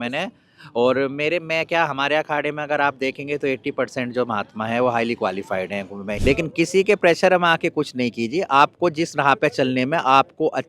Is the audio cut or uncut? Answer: cut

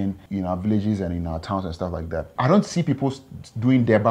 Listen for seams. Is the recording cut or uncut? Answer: uncut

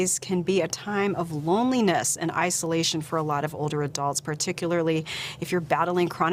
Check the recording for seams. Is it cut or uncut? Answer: uncut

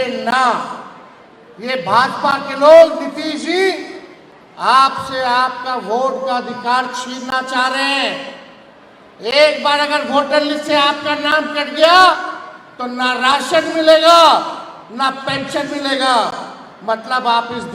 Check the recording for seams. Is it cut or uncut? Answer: uncut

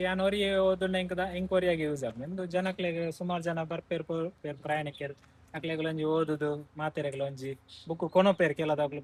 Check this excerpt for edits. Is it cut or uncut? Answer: uncut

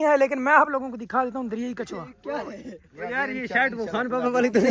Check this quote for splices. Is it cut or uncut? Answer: cut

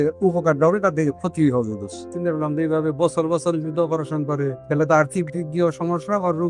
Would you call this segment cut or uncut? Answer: cut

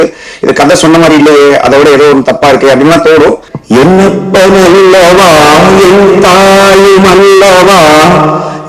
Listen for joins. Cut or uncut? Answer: cut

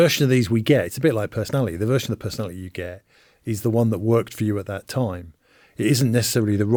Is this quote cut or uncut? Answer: uncut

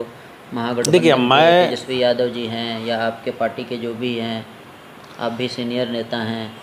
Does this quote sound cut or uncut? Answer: uncut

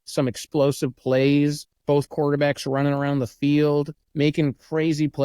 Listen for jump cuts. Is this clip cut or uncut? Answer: cut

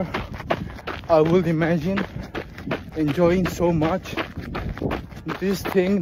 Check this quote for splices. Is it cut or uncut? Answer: uncut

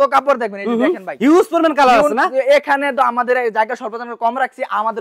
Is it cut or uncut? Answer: uncut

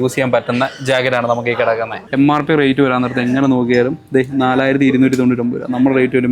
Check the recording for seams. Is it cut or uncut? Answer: cut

